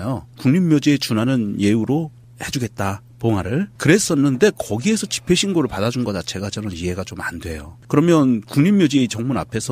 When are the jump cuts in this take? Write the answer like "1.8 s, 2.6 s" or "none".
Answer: 4.3 s